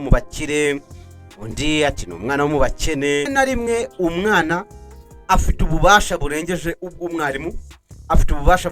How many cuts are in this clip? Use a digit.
1